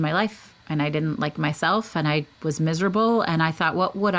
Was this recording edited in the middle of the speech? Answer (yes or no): yes